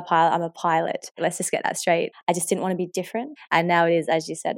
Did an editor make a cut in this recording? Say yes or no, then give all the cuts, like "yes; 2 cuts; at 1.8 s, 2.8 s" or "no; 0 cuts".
yes; 3 cuts; at 1.2 s, 2.1 s, 3.4 s